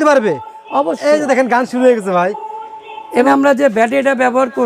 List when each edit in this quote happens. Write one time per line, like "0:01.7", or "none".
0:03.3